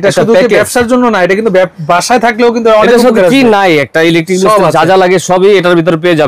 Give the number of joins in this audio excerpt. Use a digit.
0